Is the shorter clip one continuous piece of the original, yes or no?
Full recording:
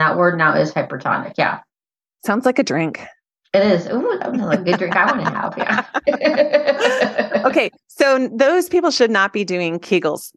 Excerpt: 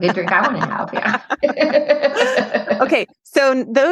yes